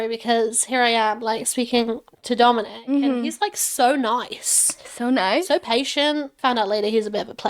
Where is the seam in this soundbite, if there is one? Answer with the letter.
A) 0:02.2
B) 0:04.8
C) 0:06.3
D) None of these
C